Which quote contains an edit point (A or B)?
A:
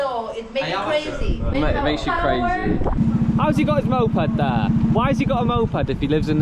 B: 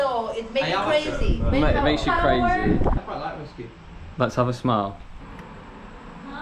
A